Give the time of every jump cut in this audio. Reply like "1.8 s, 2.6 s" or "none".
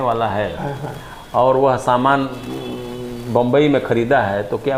none